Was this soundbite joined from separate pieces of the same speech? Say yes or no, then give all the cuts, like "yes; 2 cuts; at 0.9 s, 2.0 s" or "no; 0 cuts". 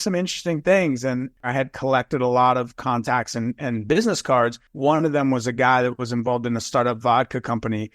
yes; 2 cuts; at 1.4 s, 4.6 s